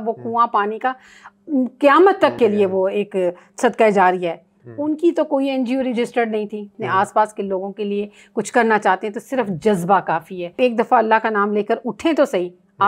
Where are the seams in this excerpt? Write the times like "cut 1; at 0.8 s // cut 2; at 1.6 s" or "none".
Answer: cut 1; at 6.7 s // cut 2; at 10.5 s